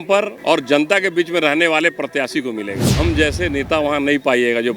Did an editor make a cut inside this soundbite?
yes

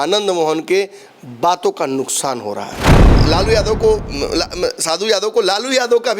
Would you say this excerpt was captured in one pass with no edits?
no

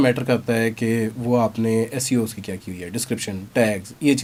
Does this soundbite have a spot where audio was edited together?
no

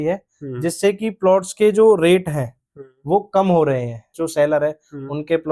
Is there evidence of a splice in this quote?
no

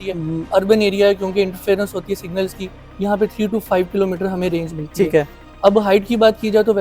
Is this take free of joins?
yes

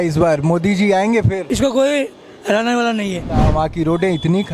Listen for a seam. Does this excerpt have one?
yes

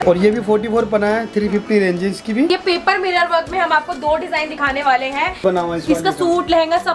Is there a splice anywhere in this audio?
yes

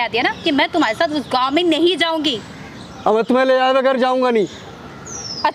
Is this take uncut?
yes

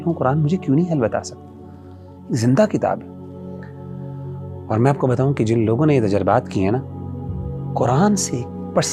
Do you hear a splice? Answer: no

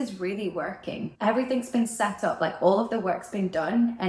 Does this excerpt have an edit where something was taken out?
yes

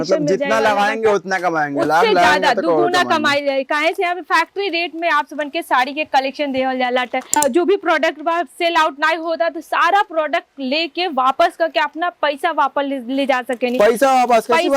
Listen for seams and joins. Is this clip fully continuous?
no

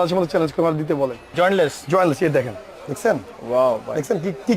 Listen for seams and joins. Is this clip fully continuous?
no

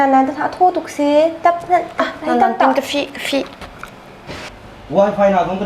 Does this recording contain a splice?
yes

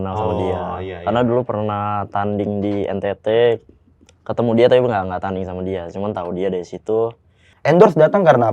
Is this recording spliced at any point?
yes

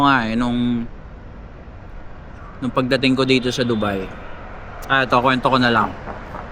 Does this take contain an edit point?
no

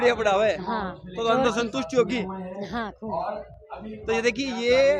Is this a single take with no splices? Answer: yes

